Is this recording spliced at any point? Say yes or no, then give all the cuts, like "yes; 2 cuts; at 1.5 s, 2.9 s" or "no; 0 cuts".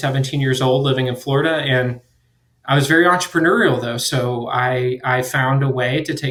no; 0 cuts